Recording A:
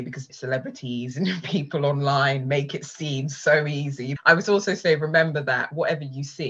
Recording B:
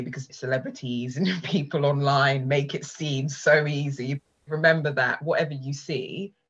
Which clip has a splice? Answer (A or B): B